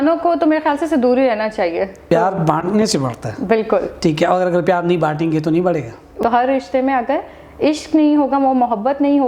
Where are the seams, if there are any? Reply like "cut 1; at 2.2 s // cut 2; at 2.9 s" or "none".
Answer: cut 1; at 2.0 s // cut 2; at 6.2 s